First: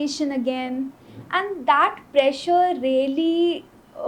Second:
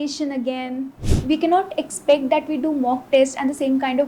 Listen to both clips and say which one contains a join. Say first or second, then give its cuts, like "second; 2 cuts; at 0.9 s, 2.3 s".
second; 1 cut; at 1.1 s